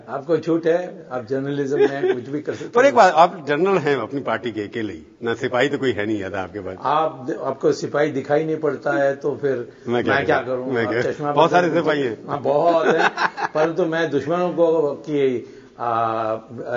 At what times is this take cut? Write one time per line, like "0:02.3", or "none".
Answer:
0:01.4